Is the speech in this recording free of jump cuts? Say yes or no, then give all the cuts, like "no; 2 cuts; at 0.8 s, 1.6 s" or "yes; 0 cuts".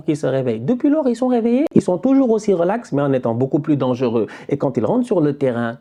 yes; 0 cuts